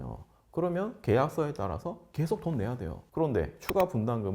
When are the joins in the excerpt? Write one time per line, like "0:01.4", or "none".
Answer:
0:03.0